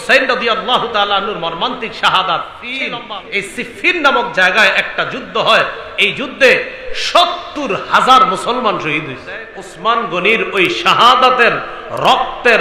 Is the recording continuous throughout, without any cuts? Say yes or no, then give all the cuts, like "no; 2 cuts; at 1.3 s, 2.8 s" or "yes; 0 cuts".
no; 2 cuts; at 2.9 s, 9.6 s